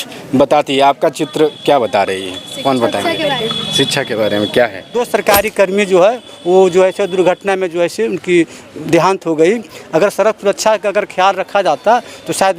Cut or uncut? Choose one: cut